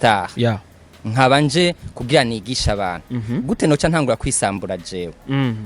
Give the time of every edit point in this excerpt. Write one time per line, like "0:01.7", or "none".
none